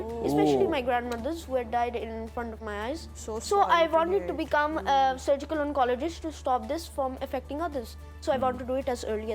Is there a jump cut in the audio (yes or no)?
no